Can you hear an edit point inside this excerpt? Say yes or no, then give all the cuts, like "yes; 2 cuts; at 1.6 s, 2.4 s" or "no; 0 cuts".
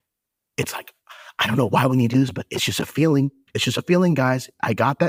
no; 0 cuts